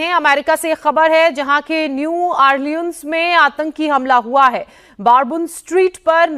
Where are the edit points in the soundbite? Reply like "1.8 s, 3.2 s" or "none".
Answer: none